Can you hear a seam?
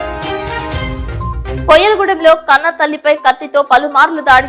yes; 1 cut; at 1.6 s

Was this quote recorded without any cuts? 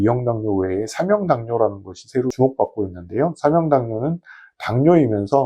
no; 1 cut; at 2.3 s

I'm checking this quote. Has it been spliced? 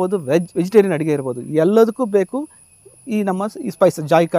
no; 0 cuts

